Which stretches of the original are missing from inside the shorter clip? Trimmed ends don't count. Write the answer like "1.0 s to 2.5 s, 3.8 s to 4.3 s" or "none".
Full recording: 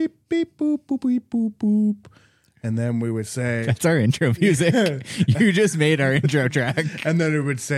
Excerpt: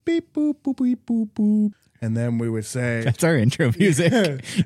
2.1 s to 2.5 s

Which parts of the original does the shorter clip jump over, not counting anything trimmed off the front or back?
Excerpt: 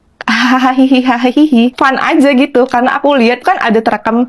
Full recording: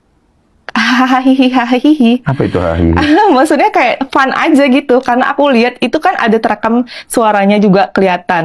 2.2 s to 4.1 s, 5.8 s to 6.0 s

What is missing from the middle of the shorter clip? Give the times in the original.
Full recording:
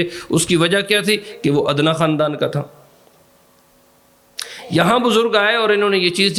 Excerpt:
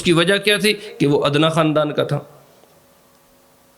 none

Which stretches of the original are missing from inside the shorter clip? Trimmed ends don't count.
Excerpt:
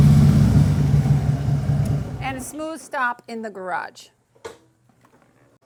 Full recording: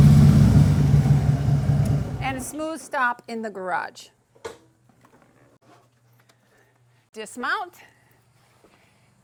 none

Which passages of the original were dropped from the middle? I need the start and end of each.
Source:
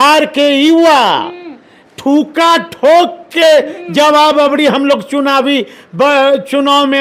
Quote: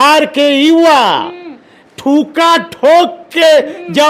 none

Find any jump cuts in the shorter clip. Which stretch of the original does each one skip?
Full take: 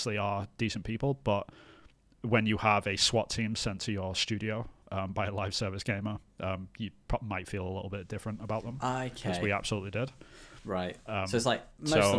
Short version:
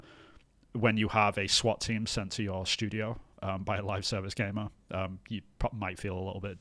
none

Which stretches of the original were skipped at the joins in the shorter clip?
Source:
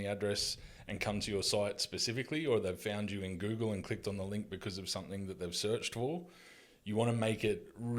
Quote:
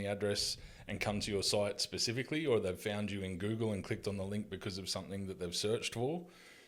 none

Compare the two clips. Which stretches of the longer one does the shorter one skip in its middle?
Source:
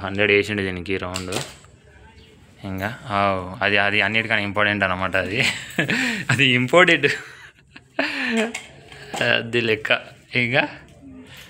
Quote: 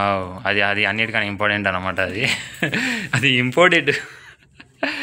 none

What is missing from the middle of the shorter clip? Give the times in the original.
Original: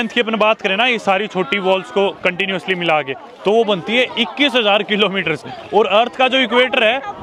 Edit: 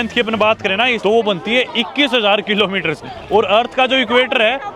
1.0 s to 3.4 s

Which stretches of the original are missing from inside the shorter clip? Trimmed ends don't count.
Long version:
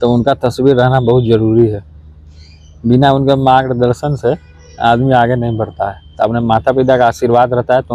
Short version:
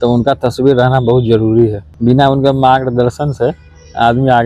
1.9 s to 2.7 s

